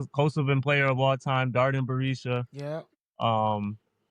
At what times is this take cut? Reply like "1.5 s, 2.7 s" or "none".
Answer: none